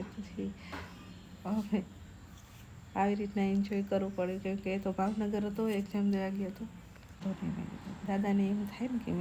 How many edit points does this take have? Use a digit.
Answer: 1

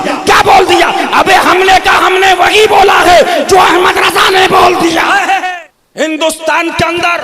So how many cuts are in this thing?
1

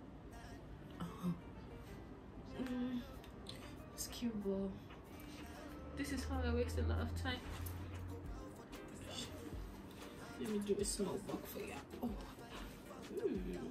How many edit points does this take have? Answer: 1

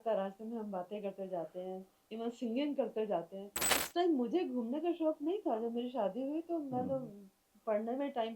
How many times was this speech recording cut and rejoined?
1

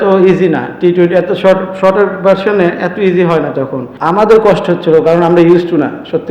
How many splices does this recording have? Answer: 1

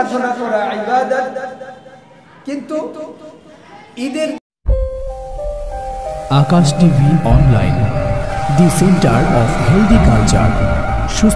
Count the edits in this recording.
1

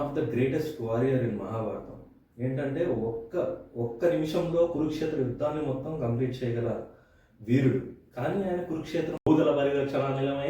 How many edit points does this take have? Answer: 1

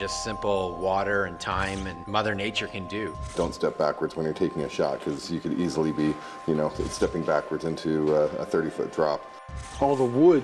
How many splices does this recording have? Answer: 3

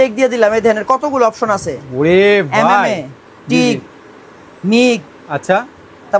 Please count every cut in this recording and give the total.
0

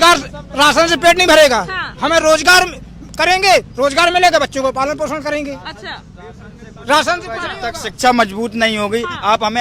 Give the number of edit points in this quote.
0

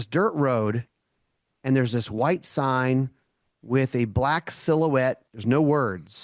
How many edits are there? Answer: 1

